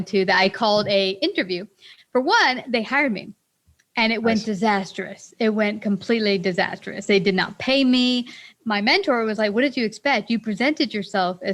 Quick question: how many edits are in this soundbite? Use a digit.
1